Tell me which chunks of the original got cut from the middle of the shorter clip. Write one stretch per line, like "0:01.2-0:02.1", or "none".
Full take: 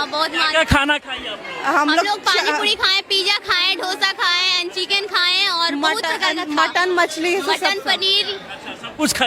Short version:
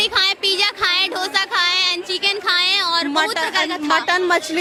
none